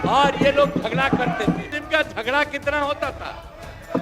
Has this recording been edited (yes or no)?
yes